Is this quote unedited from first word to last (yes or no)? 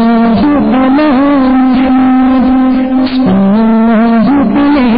no